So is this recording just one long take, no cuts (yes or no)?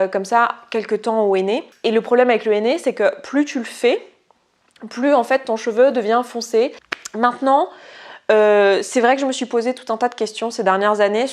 no